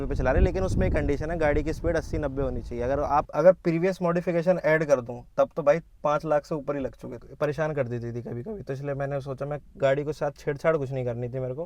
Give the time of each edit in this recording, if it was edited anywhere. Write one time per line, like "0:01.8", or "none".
0:03.3
0:07.2